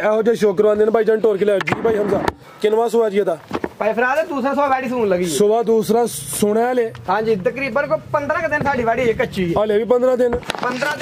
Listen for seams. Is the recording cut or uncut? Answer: uncut